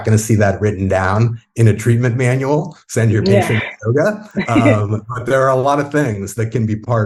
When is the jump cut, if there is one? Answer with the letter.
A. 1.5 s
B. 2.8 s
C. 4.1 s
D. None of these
D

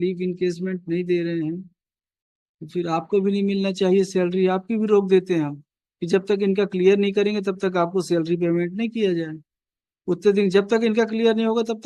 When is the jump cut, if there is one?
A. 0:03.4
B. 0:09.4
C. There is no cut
C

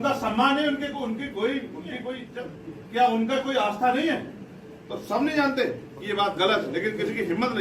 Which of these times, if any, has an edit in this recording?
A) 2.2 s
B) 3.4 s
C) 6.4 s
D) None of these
A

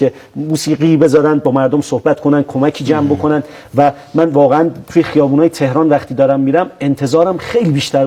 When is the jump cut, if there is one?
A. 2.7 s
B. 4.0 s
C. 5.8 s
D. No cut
D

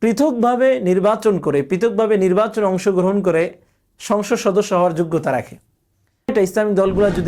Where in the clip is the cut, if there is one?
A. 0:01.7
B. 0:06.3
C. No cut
B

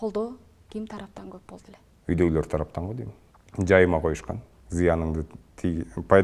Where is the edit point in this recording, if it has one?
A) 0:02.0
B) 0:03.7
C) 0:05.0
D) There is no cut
D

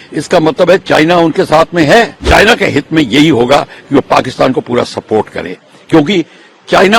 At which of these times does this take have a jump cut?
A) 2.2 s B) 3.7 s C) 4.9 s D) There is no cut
A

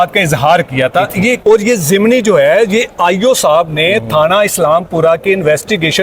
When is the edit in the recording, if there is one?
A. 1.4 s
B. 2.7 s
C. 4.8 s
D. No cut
A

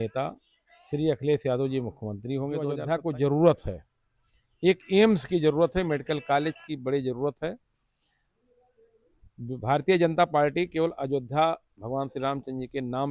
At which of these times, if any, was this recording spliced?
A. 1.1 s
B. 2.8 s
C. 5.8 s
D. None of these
B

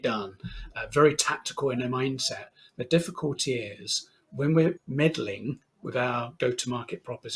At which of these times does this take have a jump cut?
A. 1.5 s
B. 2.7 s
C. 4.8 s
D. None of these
C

